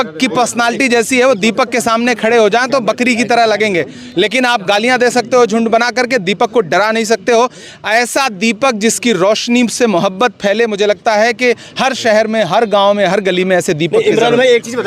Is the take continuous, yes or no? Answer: yes